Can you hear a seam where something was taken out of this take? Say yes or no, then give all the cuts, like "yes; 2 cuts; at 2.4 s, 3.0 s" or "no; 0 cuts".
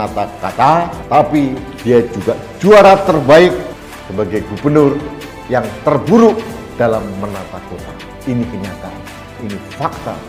no; 0 cuts